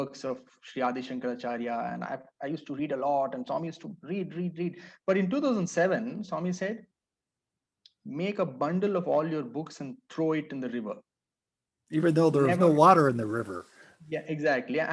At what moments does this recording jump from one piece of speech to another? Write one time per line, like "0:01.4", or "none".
none